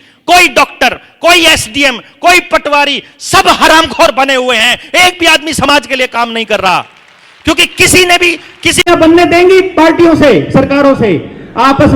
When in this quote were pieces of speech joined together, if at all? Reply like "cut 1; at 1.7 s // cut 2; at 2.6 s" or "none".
cut 1; at 8.9 s